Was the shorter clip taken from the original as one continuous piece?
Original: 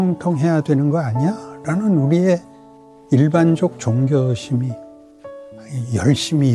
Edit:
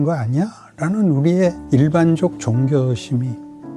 no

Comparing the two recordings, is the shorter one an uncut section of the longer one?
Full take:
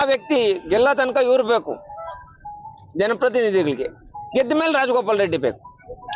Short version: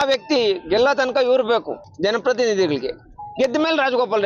no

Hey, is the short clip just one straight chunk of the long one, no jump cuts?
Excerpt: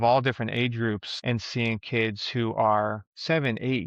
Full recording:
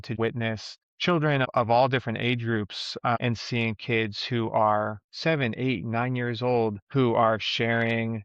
no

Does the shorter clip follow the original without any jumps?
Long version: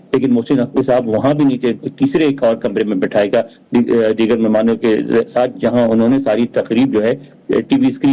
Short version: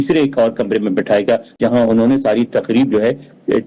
no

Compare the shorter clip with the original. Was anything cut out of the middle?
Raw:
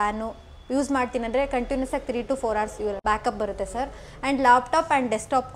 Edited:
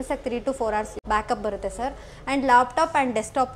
yes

